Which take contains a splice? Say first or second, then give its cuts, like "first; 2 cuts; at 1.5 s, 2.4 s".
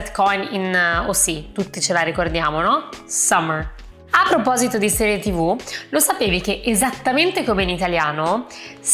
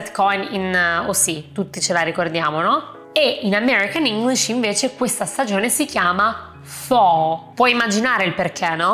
second; 2 cuts; at 3.0 s, 7.4 s